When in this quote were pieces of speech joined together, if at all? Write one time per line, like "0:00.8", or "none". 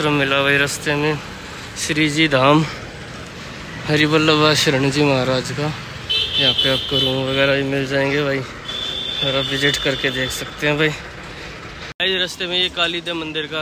none